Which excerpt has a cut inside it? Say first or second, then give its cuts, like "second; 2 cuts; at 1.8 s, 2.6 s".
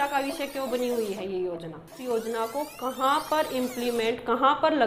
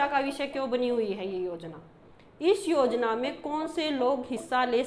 first; 1 cut; at 2.0 s